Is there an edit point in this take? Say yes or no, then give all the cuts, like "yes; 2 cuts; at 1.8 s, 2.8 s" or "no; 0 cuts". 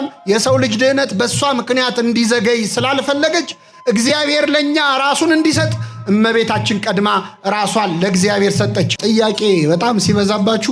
yes; 1 cut; at 9.0 s